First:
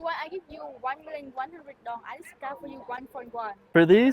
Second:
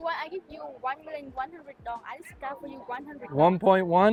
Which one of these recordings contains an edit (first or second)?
first